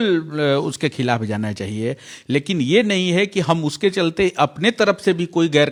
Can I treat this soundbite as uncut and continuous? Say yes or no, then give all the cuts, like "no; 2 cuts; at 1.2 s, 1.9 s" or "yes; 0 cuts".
yes; 0 cuts